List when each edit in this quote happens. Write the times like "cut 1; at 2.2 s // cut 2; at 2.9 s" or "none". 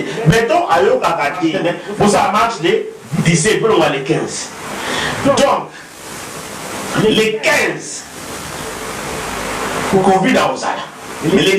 cut 1; at 1.5 s